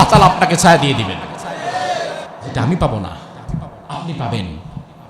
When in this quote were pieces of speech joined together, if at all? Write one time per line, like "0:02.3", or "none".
0:02.4

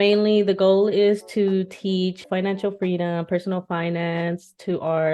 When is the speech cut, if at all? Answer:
0:02.2

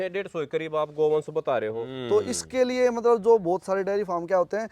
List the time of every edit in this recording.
0:01.9

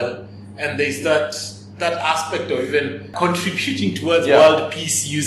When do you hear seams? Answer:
0:03.1

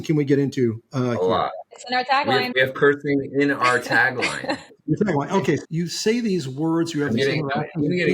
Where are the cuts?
0:02.5
0:04.7
0:05.6

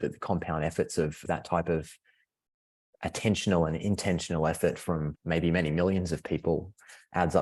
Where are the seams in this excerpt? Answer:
none

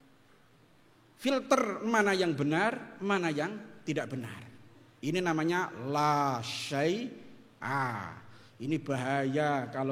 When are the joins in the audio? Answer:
none

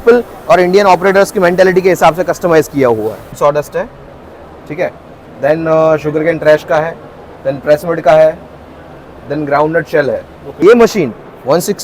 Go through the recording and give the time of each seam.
0:03.4
0:10.4

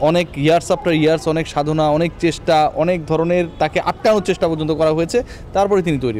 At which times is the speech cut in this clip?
none

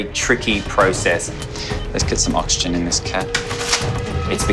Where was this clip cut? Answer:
0:01.3

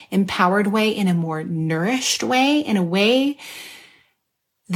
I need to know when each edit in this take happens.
none

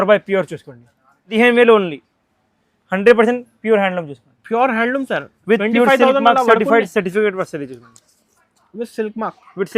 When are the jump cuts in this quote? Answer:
0:01.3

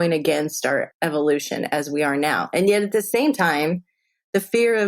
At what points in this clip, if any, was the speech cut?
0:00.9

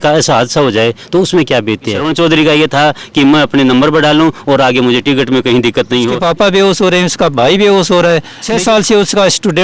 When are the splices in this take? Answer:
0:02.0
0:06.2
0:08.4

